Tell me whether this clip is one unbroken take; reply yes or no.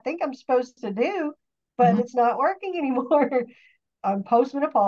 yes